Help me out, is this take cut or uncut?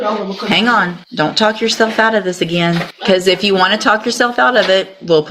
cut